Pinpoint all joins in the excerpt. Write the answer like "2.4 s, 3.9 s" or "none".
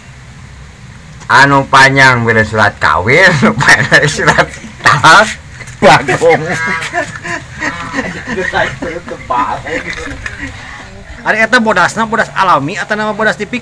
11.0 s